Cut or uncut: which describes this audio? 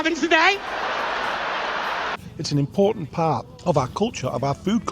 cut